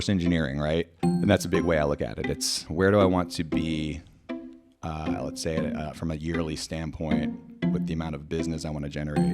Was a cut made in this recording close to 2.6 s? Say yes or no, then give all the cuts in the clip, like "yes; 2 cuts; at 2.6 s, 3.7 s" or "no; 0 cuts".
yes; 2 cuts; at 1.0 s, 2.6 s